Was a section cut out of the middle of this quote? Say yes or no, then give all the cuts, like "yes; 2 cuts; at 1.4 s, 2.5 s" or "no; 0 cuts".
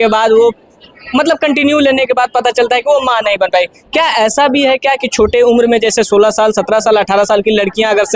no; 0 cuts